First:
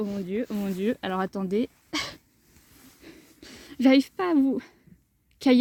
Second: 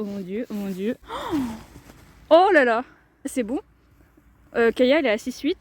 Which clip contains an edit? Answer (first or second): second